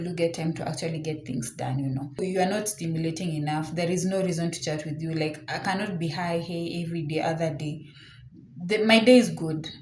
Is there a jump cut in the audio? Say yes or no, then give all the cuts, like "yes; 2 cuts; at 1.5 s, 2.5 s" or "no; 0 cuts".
yes; 1 cut; at 2.2 s